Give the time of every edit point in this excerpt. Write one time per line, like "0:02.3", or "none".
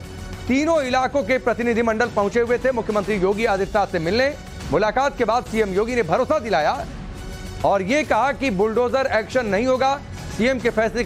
none